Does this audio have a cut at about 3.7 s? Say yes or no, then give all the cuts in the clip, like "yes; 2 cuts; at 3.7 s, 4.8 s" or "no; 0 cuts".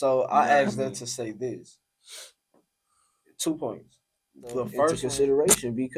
no; 1 cut; at 5.0 s